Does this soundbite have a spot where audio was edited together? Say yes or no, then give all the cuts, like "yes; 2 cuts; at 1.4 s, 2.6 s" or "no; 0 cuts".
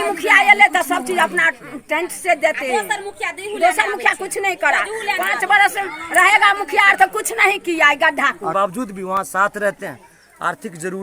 yes; 1 cut; at 8.5 s